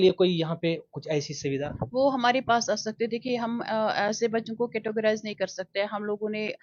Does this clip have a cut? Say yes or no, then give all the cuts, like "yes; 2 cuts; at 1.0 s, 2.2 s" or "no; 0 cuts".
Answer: no; 0 cuts